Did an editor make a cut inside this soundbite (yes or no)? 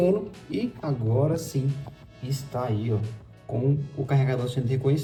no